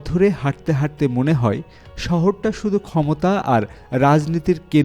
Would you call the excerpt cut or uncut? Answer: uncut